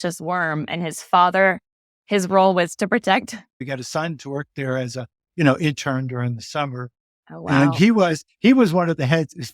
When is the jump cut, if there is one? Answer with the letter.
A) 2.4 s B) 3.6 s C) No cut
B